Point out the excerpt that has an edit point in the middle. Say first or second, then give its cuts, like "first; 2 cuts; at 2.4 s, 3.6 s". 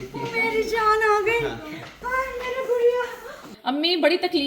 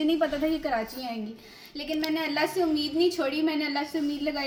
first; 1 cut; at 3.5 s